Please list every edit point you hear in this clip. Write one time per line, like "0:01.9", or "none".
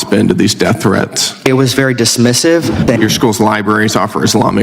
0:01.5
0:02.9